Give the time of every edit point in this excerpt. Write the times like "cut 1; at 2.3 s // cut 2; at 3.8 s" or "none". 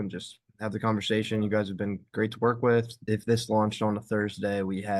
cut 1; at 3.1 s